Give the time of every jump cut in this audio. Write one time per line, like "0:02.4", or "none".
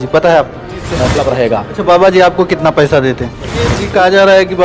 0:01.1
0:03.8